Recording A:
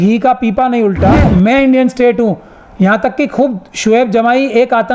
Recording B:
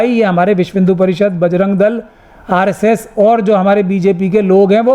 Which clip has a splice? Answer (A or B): A